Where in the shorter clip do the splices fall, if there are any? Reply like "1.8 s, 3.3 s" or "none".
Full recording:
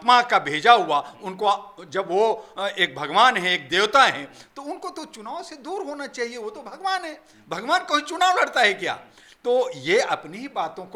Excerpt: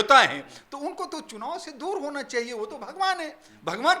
none